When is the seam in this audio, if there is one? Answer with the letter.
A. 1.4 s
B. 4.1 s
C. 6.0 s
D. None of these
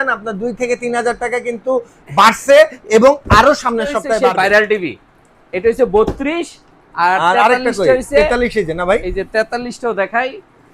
B